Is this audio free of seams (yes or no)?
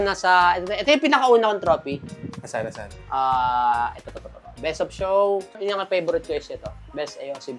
no